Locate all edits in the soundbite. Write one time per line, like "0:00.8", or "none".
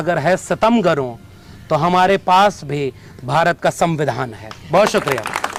none